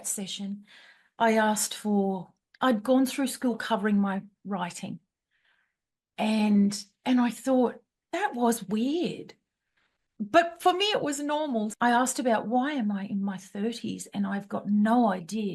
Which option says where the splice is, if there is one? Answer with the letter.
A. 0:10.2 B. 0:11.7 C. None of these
B